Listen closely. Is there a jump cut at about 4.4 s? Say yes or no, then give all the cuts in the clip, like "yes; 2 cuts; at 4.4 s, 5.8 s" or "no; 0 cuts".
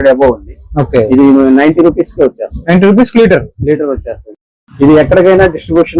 no; 0 cuts